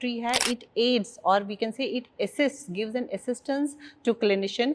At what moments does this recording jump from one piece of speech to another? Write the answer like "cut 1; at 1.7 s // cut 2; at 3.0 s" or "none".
none